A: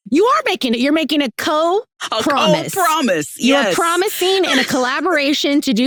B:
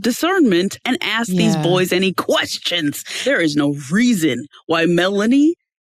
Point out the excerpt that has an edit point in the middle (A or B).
B